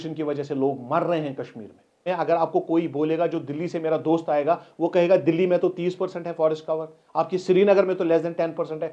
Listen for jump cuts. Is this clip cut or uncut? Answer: cut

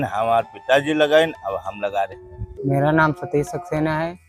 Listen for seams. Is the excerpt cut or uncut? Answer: cut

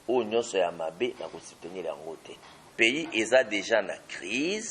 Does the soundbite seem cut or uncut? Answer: cut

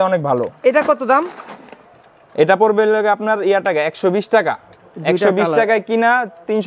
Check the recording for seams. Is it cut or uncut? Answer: uncut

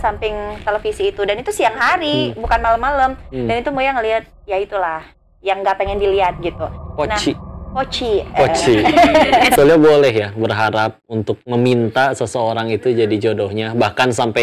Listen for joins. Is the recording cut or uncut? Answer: cut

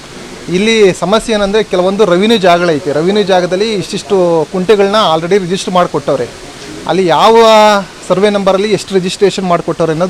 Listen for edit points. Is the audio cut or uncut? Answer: uncut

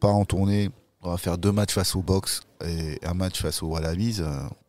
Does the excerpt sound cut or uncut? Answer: uncut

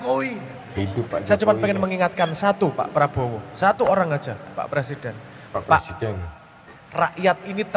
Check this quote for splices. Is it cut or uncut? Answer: cut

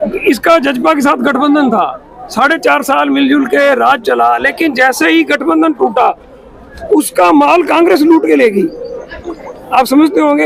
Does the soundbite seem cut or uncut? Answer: uncut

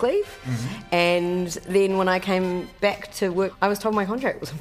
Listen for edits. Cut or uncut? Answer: cut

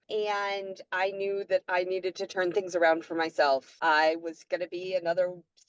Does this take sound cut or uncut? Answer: cut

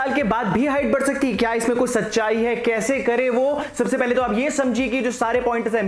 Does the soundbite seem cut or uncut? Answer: uncut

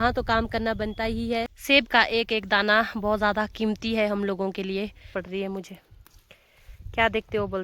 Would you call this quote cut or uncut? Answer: cut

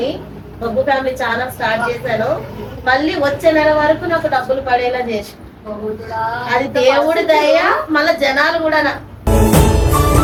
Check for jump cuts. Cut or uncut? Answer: uncut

